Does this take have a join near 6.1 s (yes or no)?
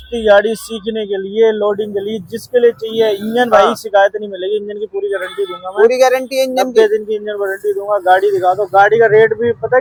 no